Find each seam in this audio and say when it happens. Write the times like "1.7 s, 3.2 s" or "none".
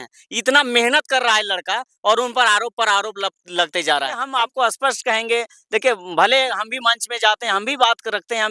4.3 s